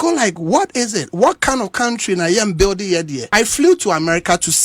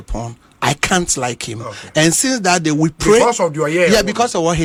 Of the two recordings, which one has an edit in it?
first; 1 cut; at 3.2 s

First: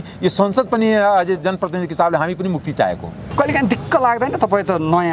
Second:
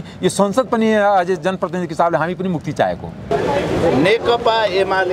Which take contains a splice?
second; 1 cut; at 3.3 s

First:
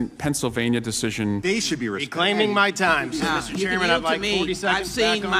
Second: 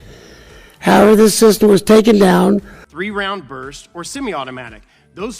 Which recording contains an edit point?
first; 1 cut; at 1.4 s

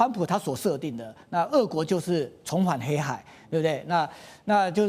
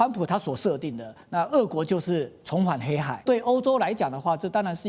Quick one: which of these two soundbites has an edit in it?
second; 1 cut; at 3.2 s

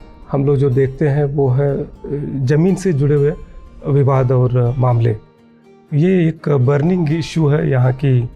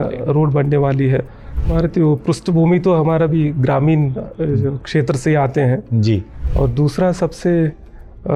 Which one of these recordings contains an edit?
second; 2 cuts; at 1.6 s, 6.4 s

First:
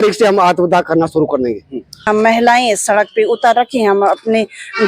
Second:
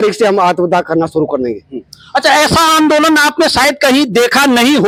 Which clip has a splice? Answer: first; 1 cut; at 2.0 s

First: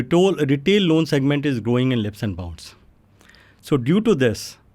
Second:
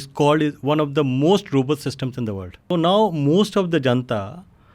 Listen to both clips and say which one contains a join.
second; 1 cut; at 2.6 s

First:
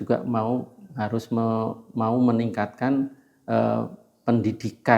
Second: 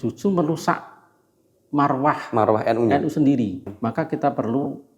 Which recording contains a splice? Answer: second; 1 cut; at 3.7 s

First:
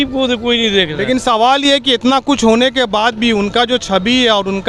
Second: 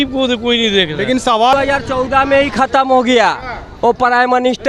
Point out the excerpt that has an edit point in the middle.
second; 1 cut; at 1.5 s

